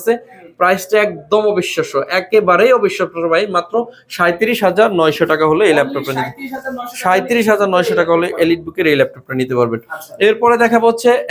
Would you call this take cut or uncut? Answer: uncut